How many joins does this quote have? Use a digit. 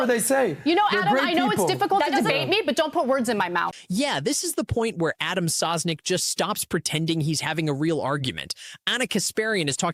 0